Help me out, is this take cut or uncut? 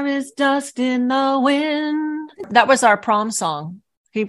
cut